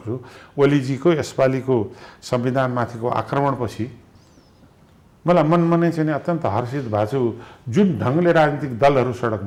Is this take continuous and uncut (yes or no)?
yes